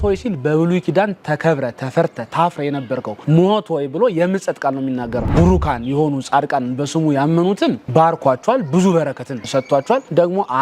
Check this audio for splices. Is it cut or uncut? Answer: cut